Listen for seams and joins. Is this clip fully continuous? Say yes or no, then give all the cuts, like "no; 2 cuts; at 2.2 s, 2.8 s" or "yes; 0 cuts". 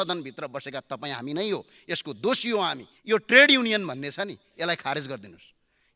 no; 1 cut; at 2.9 s